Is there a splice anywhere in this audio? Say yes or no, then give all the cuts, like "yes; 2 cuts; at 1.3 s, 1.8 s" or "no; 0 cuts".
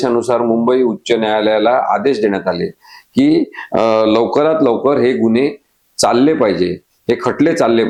no; 0 cuts